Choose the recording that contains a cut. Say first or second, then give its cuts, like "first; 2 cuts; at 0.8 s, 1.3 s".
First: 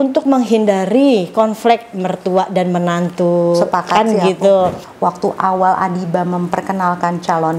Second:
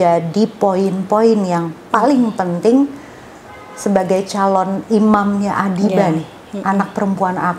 first; 1 cut; at 4.8 s